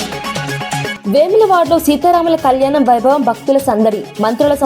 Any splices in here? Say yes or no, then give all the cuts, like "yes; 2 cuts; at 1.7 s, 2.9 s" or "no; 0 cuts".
yes; 1 cut; at 0.9 s